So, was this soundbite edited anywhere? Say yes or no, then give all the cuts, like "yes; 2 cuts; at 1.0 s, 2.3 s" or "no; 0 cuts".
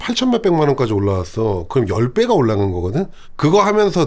no; 0 cuts